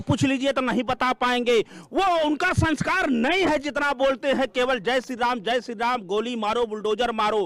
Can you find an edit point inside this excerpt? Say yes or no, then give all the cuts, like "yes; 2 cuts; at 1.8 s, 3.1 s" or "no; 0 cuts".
no; 0 cuts